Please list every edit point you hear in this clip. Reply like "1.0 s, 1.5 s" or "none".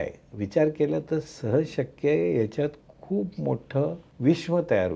4.1 s